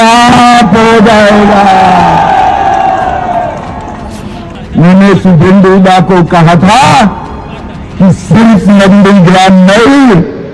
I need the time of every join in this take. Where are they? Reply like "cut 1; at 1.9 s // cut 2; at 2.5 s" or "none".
cut 1; at 4.6 s